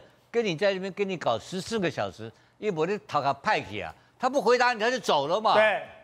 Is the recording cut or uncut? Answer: uncut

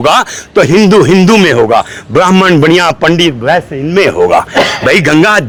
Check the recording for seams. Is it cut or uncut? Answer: uncut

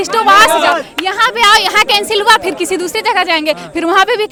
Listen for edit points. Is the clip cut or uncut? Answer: uncut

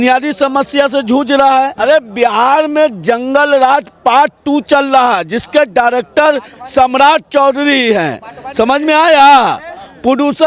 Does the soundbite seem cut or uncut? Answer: cut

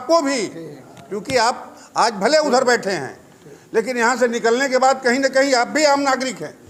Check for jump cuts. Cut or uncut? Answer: uncut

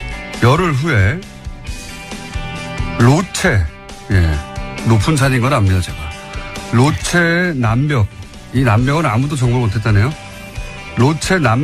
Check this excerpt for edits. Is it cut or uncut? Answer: uncut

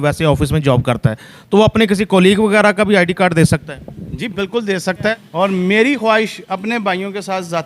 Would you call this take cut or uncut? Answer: cut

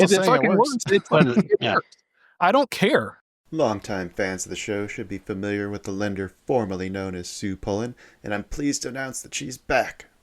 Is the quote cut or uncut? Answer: cut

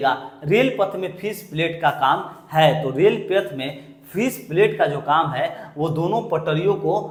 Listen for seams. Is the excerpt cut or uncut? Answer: uncut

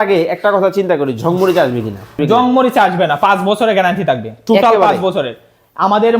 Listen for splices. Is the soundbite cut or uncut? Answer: cut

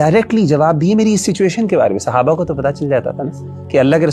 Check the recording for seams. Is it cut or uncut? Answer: uncut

